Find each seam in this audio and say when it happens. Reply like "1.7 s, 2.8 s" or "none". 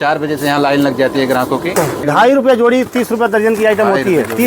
2.0 s